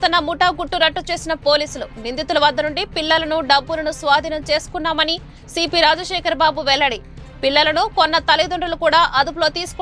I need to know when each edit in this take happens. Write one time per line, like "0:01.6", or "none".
none